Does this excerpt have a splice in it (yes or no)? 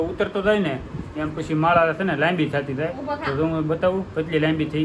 no